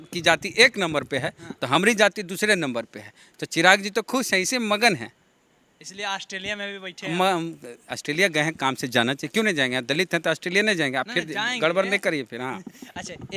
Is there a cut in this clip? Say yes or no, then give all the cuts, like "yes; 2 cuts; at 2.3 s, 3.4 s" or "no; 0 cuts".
no; 0 cuts